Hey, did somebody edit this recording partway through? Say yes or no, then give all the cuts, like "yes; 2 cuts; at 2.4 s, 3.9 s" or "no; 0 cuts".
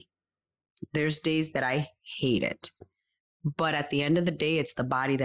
no; 0 cuts